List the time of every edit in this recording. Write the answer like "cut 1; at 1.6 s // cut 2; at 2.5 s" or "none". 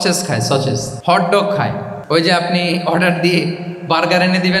cut 1; at 0.9 s // cut 2; at 1.9 s